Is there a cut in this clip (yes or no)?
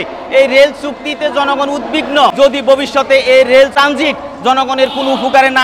yes